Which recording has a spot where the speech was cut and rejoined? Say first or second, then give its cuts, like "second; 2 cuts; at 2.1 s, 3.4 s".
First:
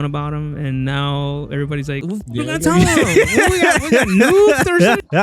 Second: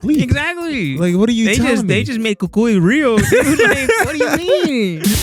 first; 1 cut; at 2.1 s